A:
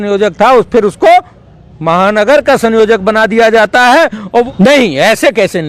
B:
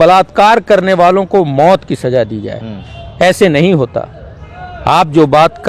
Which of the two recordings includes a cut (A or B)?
A